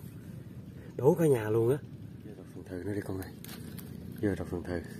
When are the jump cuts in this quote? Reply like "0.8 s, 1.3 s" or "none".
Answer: 2.6 s